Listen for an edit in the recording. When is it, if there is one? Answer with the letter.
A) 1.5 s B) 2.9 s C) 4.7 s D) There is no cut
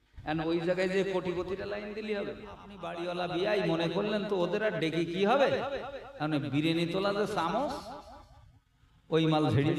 B